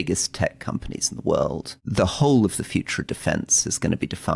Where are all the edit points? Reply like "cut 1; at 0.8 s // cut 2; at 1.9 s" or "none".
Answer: cut 1; at 1.8 s